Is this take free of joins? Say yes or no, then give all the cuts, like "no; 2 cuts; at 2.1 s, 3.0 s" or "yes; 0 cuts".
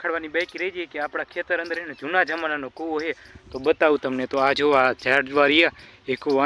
yes; 0 cuts